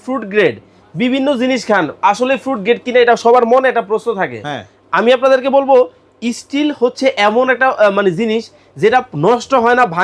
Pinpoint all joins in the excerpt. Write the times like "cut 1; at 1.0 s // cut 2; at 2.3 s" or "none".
none